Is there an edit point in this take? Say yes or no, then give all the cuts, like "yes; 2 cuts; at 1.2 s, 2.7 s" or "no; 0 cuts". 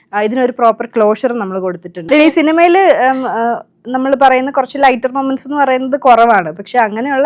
yes; 1 cut; at 2.1 s